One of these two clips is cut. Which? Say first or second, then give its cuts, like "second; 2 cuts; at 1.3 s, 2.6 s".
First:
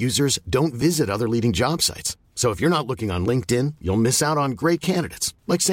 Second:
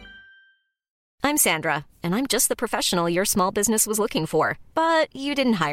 second; 1 cut; at 1.0 s